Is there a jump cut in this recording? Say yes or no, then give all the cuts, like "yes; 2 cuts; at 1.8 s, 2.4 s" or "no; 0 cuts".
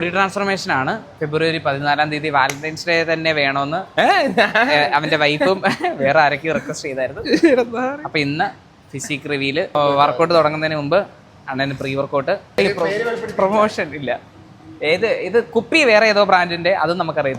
yes; 2 cuts; at 9.8 s, 12.6 s